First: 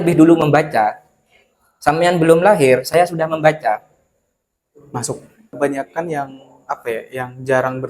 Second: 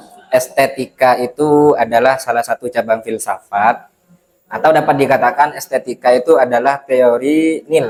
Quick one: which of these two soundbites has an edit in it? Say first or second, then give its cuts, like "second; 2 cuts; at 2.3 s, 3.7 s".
first; 1 cut; at 5.5 s